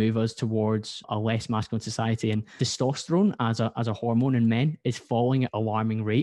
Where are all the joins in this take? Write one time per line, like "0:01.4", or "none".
0:01.1
0:02.5
0:05.5